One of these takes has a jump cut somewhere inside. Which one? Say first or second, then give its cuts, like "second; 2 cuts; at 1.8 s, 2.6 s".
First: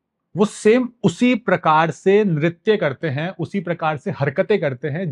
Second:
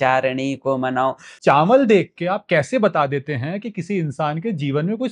second; 1 cut; at 1.3 s